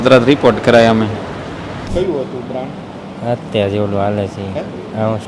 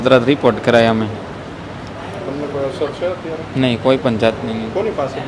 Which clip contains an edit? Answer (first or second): first